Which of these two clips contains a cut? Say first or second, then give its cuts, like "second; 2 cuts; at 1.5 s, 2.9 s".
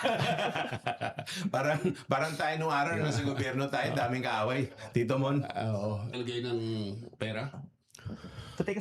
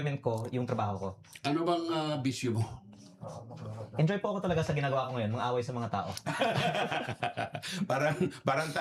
first; 1 cut; at 6.1 s